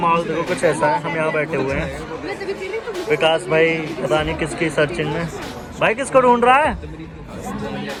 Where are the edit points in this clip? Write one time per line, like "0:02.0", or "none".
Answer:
none